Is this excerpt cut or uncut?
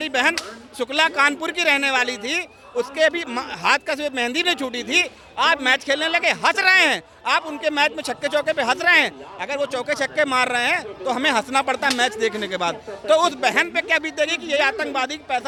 uncut